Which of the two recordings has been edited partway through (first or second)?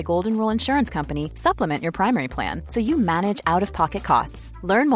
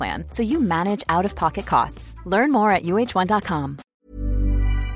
second